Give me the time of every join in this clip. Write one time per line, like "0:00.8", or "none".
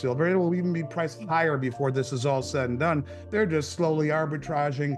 none